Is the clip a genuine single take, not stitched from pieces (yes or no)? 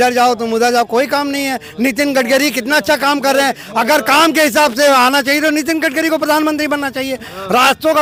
yes